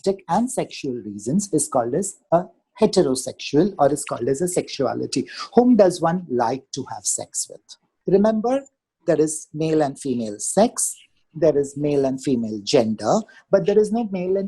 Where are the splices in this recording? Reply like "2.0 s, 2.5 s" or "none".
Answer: 7.9 s